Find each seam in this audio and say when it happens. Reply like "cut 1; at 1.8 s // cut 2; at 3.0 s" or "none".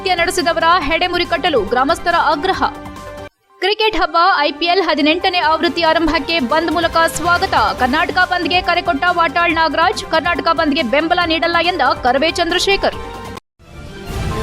cut 1; at 13.3 s